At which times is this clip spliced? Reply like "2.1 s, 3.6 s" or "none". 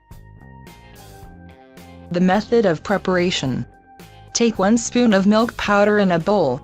2.0 s